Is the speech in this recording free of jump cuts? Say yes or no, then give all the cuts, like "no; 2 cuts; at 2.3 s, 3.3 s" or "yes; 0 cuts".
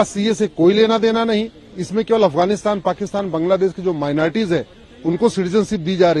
yes; 0 cuts